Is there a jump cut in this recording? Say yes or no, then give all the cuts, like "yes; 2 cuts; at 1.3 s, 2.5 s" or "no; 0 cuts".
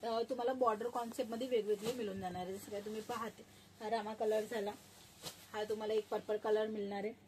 no; 0 cuts